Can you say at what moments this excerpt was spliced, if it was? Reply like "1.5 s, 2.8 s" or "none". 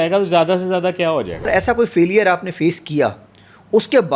1.5 s